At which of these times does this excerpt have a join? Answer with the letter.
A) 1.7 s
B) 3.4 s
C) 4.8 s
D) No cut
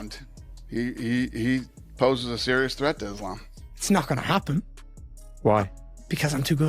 B